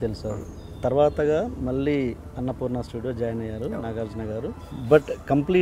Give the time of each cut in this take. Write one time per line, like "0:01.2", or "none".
0:04.7